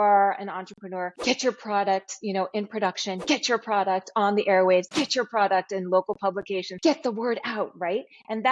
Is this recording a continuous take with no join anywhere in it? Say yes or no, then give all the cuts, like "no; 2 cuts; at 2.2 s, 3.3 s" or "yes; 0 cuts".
no; 2 cuts; at 1.1 s, 6.7 s